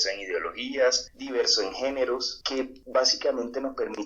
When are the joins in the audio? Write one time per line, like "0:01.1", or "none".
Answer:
0:01.1
0:02.7